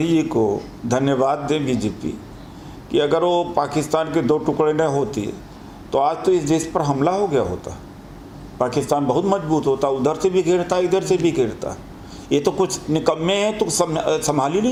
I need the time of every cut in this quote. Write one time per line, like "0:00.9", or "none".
none